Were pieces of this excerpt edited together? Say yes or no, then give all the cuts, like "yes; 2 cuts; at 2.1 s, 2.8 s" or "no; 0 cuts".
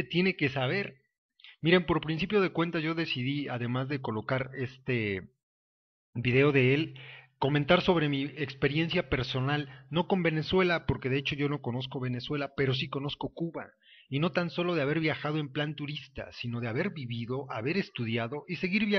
no; 0 cuts